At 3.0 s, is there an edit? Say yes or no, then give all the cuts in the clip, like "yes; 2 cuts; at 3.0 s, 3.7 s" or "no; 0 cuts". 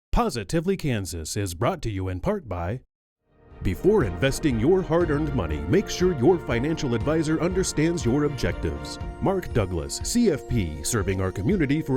yes; 1 cut; at 3.0 s